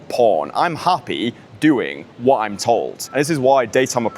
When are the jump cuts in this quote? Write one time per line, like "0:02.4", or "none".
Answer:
0:03.0